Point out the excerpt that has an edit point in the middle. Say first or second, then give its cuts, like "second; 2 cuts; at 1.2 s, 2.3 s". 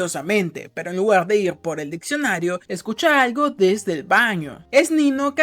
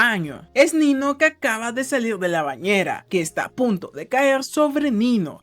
second; 1 cut; at 3.0 s